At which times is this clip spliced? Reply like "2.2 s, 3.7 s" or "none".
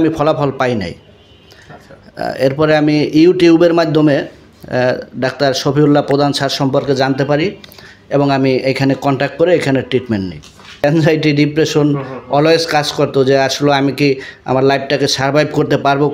10.8 s